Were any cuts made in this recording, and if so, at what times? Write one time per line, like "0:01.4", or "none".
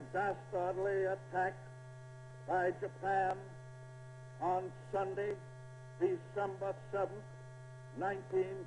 0:07.3